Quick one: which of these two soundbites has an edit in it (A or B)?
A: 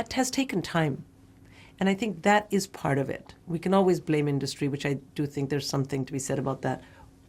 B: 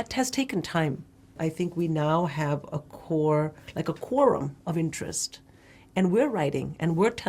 B